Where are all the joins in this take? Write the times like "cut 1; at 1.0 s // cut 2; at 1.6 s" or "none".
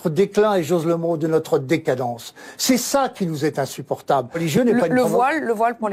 cut 1; at 4.4 s